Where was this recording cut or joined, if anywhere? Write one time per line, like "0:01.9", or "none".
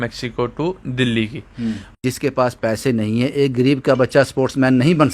0:02.0